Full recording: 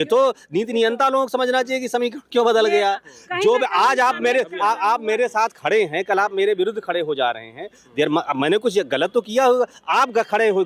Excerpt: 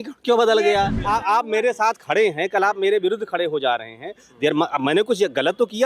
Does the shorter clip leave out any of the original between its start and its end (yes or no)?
yes